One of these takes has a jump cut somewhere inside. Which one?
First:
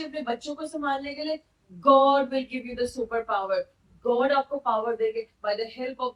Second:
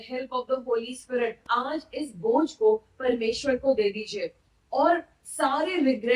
second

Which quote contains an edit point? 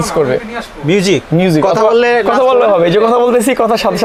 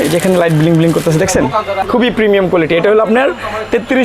second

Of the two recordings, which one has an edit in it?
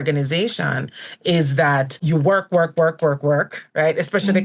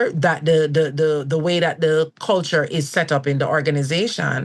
first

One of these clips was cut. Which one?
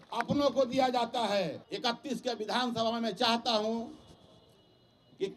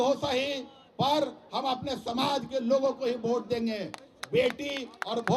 first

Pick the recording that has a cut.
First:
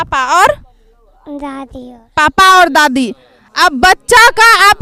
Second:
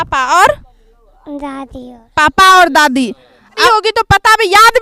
second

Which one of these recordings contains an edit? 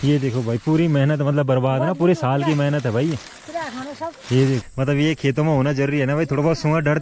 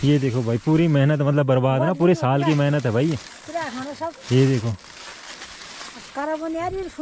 first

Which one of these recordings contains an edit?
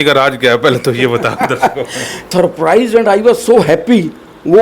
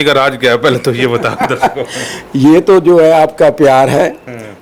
first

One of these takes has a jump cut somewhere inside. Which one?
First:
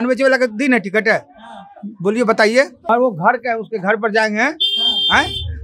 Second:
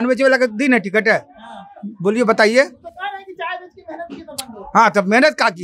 first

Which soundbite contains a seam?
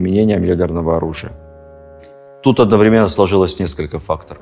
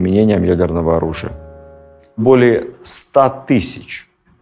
second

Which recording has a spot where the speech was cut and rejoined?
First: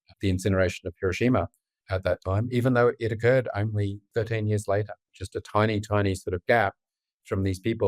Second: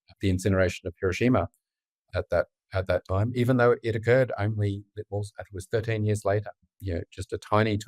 first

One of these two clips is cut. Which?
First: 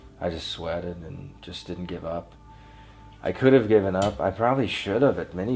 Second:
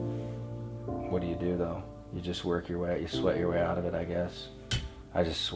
second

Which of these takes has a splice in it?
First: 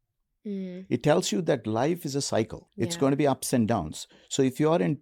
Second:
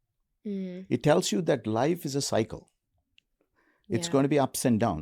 first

